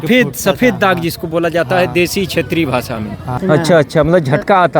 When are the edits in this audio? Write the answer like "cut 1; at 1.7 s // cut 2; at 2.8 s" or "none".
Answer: cut 1; at 3.4 s